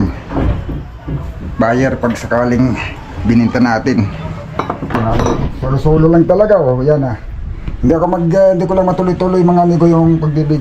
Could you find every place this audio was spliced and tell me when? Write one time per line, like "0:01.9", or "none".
0:05.4

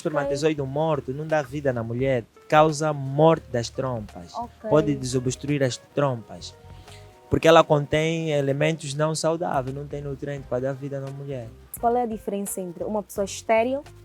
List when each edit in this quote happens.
0:11.8

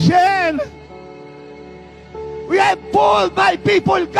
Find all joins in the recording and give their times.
none

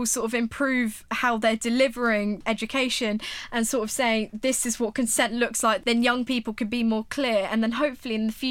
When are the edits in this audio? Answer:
0:02.4
0:05.8

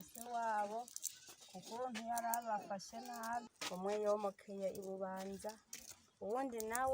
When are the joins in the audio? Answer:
0:03.6

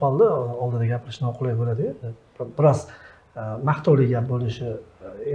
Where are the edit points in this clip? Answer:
none

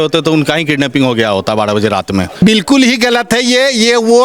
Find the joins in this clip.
0:02.4

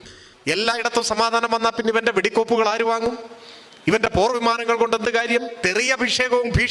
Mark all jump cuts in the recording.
0:05.5

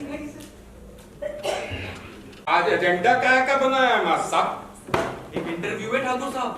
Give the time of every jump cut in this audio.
0:02.5

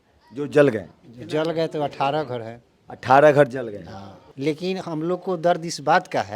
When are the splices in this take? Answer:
0:04.3

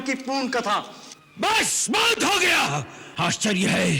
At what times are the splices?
0:03.0

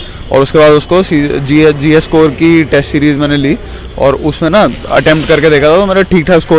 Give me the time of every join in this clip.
none

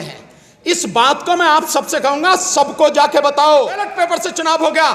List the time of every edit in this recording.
0:03.9

